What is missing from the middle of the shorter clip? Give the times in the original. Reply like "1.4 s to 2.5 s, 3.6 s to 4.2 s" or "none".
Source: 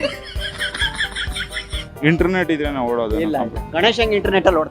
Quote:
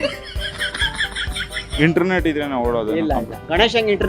1.7 s to 2.0 s